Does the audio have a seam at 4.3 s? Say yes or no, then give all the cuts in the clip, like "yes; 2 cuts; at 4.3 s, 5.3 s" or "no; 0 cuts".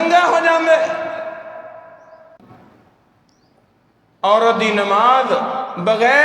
no; 1 cut; at 2.3 s